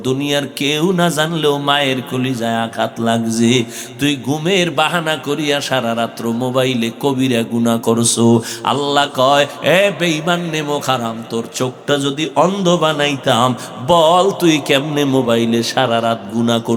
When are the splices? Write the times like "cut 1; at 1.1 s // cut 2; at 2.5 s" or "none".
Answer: none